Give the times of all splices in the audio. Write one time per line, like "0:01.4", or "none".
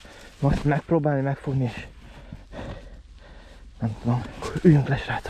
0:04.3